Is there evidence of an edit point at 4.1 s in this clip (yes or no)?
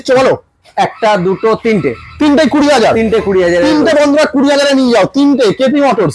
no